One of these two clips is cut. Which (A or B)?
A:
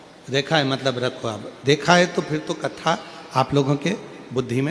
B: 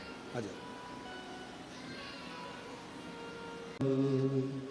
B